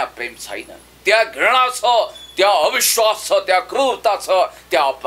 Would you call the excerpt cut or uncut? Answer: uncut